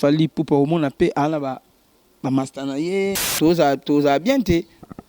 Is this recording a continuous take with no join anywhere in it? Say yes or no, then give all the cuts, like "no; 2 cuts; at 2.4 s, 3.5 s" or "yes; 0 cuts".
no; 1 cut; at 3.3 s